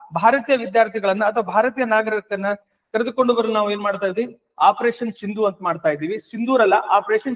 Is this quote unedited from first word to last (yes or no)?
yes